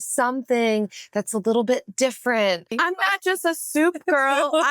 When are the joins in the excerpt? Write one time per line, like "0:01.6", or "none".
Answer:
0:02.8